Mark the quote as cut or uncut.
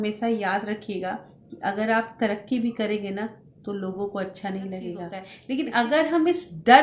cut